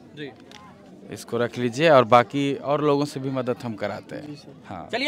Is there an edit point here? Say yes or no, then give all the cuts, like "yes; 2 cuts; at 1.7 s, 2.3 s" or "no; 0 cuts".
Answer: no; 0 cuts